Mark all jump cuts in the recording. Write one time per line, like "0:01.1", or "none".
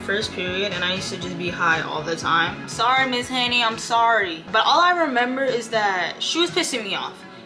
0:02.7
0:04.5